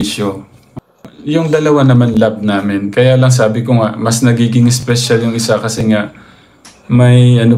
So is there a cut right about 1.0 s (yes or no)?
yes